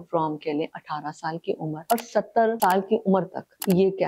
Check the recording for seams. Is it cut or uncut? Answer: uncut